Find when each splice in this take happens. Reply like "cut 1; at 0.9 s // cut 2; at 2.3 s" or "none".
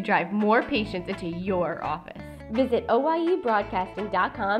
none